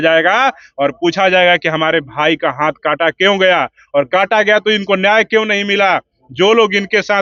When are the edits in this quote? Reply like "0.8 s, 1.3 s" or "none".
none